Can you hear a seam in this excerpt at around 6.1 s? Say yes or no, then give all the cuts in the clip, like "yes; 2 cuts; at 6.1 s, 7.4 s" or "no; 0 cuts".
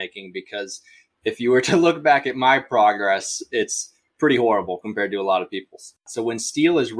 yes; 1 cut; at 6.1 s